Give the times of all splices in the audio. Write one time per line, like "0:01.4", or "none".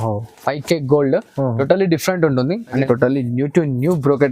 0:02.8

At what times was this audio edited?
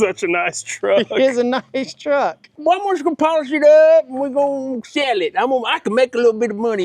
0:02.5

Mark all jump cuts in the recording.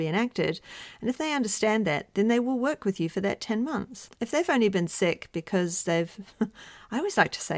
0:04.0

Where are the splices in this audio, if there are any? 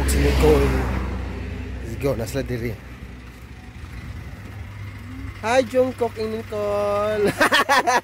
none

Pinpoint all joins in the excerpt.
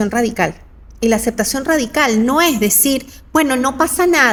none

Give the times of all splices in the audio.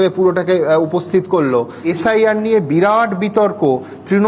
0:01.9

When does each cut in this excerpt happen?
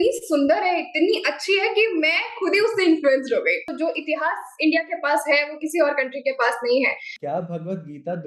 0:03.7
0:07.1

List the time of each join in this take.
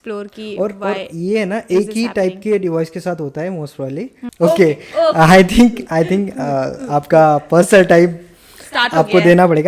0:04.2

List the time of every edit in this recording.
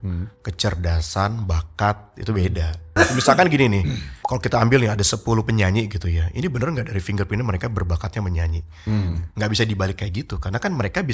0:02.8

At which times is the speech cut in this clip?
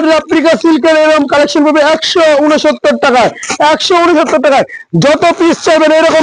none

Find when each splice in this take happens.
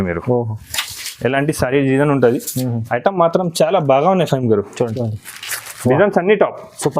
0:04.8

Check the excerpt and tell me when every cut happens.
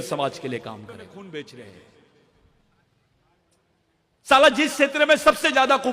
0:01.1

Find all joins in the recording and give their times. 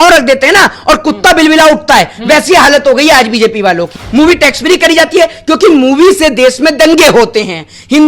0:03.9

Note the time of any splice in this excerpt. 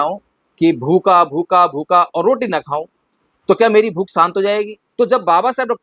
0:04.8

